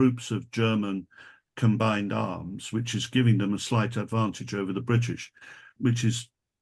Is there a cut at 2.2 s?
no; 1 cut; at 5.7 s

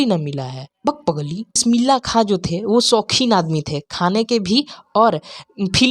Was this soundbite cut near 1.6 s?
yes; 1 cut; at 1.6 s

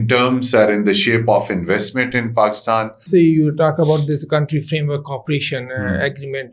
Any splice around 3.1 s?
yes; 1 cut; at 3.1 s

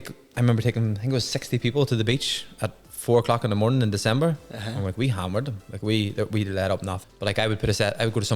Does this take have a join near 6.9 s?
yes; 1 cut; at 6.9 s

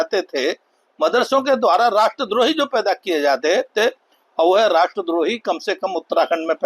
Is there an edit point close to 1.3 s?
no; 0 cuts

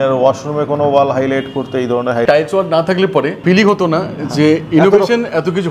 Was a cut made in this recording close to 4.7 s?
no; 2 cuts; at 2.3 s, 3.4 s

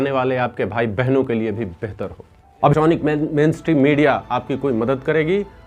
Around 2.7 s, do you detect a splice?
yes; 1 cut; at 2.7 s

